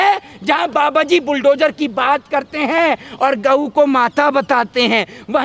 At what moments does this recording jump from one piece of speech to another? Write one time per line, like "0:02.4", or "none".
none

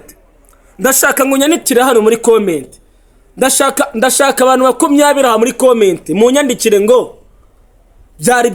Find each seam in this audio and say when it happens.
none

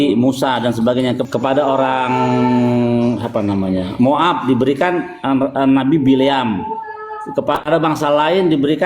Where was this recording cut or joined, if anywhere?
0:01.2

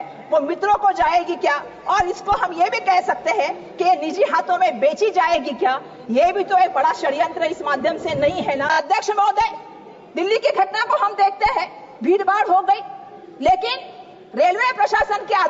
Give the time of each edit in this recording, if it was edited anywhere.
0:08.7

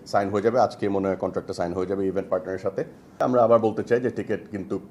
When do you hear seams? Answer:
0:03.1

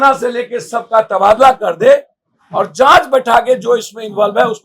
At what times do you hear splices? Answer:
none

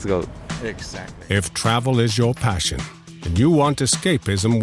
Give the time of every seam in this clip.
0:01.0

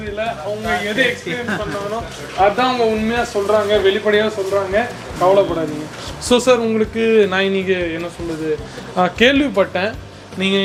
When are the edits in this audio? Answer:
none

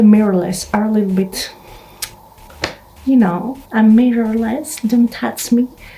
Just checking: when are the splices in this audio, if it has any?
none

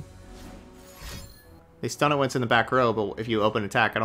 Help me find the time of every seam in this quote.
0:01.6

